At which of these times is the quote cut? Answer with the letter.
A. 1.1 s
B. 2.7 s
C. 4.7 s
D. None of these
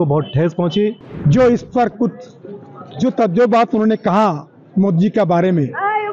A